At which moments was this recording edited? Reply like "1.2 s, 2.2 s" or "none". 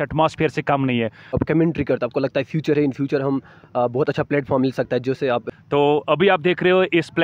1.4 s, 5.4 s